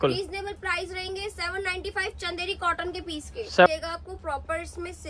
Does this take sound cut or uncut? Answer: cut